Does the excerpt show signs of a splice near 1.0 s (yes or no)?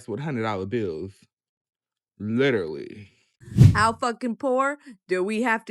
no